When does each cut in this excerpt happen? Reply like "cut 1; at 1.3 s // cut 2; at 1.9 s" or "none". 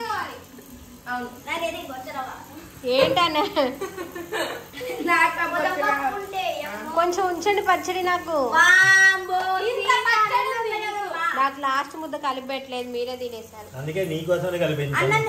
none